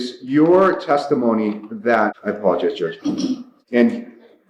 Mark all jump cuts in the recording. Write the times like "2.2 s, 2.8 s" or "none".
none